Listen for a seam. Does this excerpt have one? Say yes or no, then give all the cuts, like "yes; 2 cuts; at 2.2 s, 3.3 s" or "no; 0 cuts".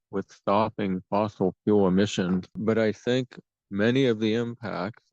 yes; 1 cut; at 2.6 s